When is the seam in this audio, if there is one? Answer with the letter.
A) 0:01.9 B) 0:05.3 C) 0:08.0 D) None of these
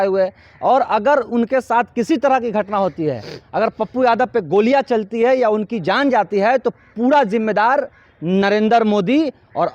D